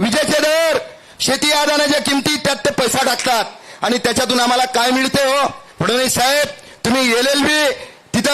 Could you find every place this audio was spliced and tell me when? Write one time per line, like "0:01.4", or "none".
0:05.7